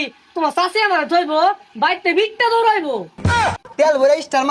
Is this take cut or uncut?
cut